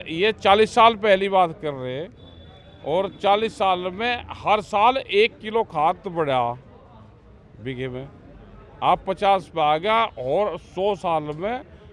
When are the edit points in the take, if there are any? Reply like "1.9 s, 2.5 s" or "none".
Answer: none